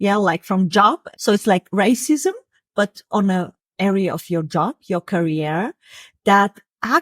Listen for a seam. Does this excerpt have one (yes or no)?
yes